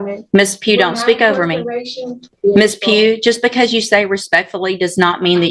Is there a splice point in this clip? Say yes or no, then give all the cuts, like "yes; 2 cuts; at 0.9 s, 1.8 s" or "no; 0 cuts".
yes; 1 cut; at 2.3 s